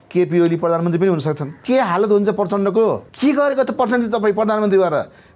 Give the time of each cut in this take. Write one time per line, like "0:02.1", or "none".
0:01.5
0:03.1

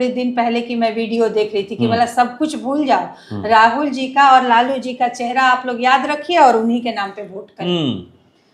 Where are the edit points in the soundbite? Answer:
none

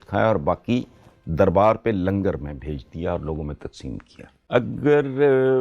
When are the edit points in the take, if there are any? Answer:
0:04.3

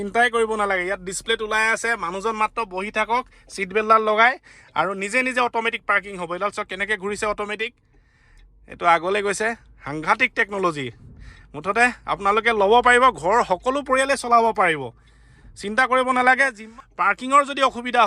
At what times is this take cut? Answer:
0:16.6

